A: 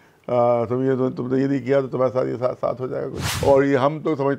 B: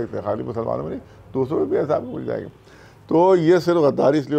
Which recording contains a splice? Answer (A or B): A